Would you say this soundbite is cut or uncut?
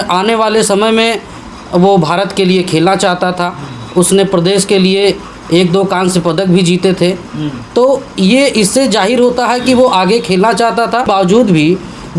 cut